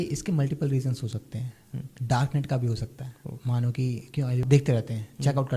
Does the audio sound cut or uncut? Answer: cut